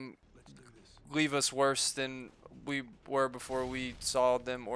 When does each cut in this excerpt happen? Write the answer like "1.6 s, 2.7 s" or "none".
none